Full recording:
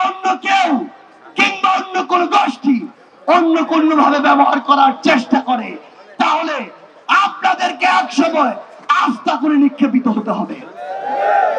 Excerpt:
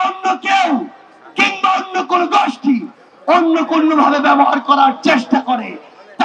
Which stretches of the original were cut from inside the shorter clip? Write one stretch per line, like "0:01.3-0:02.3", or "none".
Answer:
none

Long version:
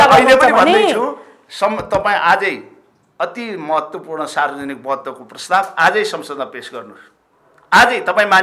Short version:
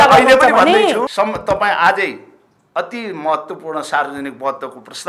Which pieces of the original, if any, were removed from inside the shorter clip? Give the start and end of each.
0:01.1-0:01.5

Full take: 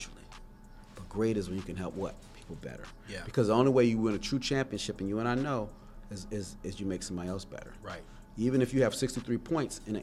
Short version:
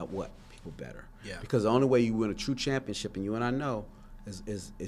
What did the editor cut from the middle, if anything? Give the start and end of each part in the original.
none

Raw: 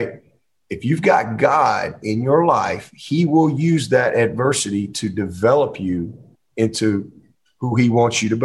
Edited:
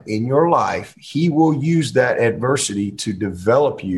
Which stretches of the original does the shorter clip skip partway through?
none

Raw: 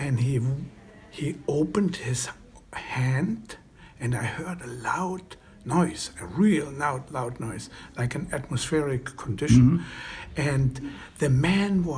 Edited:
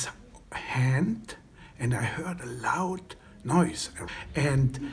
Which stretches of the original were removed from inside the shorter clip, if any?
0:06.2-0:10.0

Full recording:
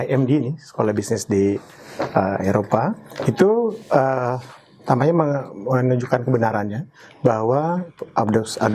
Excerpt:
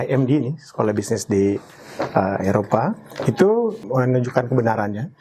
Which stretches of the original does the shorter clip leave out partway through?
0:03.8-0:05.5

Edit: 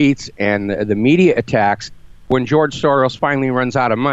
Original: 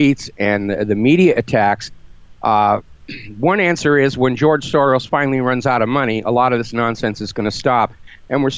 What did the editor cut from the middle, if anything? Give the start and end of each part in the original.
0:02.2-0:04.2

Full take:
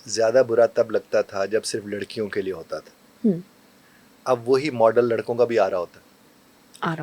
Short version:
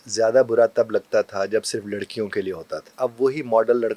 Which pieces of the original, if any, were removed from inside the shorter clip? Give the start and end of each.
0:02.8-0:04.1

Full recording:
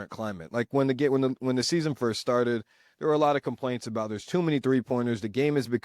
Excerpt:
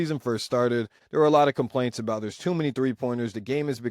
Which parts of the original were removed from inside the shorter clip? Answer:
0:02.7-0:02.8

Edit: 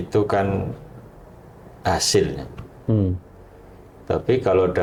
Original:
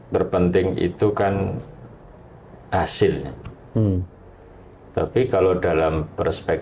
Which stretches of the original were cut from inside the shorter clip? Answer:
none

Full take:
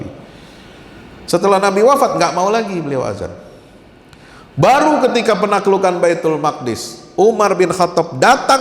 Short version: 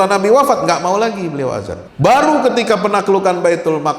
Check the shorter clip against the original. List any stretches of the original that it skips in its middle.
0:03.3-0:04.4

